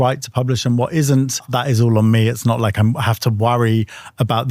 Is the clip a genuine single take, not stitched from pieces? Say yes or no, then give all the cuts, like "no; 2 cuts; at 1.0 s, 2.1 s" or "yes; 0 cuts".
no; 1 cut; at 1.5 s